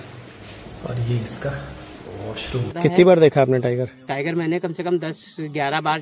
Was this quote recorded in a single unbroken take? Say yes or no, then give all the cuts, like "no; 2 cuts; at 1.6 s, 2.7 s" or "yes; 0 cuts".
no; 1 cut; at 2.7 s